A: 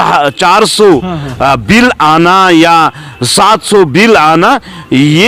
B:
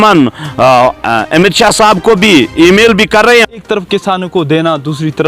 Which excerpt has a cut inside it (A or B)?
B